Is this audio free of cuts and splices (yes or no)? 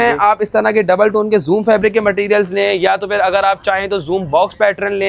yes